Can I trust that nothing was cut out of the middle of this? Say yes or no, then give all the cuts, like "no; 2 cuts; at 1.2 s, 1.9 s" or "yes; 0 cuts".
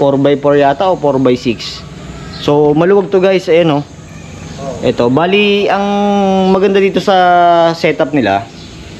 yes; 0 cuts